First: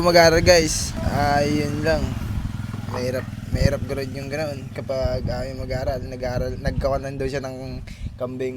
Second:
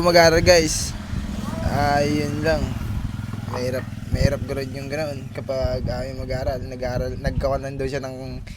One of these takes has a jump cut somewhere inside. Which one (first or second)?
first